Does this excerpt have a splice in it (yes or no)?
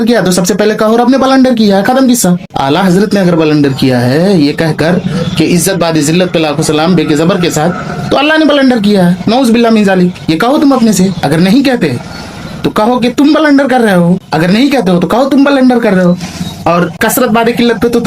no